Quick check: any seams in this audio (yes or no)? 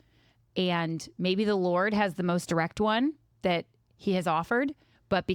no